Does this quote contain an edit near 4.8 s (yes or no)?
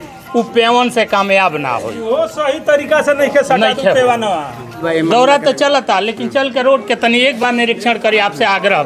yes